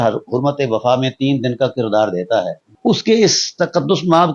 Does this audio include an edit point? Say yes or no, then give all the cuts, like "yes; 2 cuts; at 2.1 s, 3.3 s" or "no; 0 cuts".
yes; 1 cut; at 2.6 s